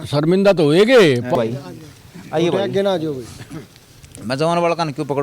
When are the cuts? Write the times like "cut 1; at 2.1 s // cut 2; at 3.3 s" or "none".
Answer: cut 1; at 1.0 s